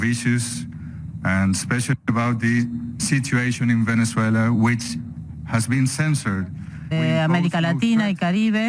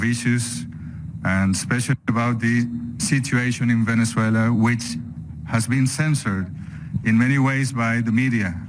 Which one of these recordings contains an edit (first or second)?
second